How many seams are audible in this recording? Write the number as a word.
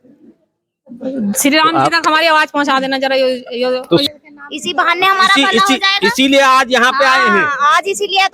one